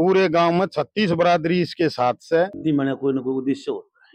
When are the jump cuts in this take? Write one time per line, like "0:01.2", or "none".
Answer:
0:02.6